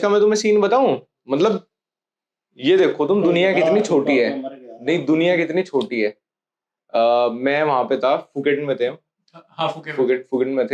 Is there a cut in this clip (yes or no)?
no